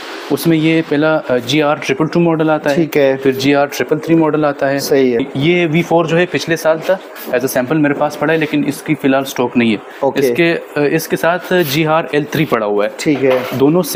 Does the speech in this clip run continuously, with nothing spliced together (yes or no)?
yes